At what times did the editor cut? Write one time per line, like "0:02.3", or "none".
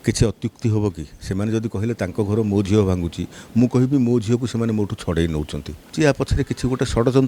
0:05.9